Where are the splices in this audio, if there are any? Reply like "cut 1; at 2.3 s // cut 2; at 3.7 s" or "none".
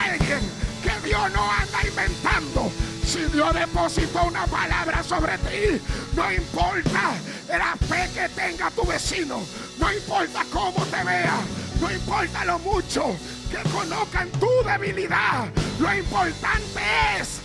none